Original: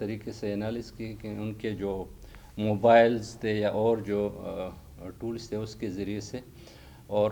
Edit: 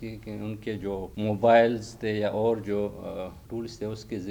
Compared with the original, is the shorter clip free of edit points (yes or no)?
no